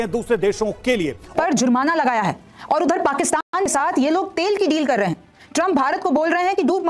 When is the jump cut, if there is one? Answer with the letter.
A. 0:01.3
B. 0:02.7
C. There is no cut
A